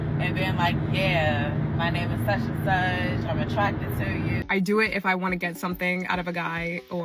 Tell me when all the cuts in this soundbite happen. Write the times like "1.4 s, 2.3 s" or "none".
4.4 s